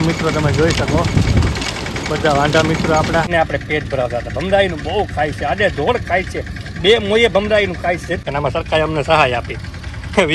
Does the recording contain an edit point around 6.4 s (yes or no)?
no